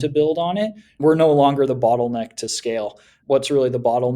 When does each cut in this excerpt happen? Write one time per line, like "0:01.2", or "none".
0:01.0
0:03.1